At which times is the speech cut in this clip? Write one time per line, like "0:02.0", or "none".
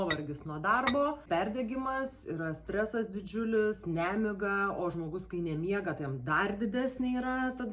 0:01.3